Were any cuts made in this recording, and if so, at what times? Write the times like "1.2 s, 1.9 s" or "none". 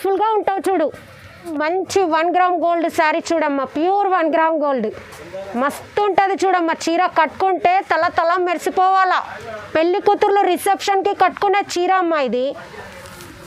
1.5 s